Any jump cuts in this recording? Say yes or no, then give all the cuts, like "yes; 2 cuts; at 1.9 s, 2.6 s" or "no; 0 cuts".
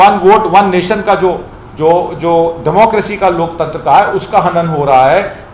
no; 0 cuts